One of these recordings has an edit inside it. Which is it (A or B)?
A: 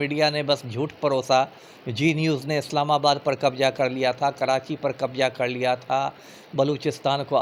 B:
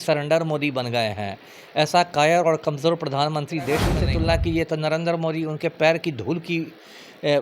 B